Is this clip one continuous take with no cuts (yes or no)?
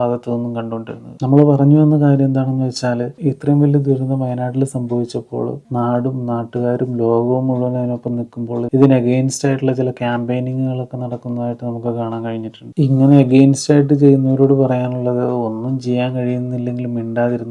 yes